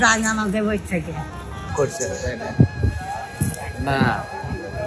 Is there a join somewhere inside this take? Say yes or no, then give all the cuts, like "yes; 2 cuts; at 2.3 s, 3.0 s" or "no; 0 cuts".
yes; 1 cut; at 1.7 s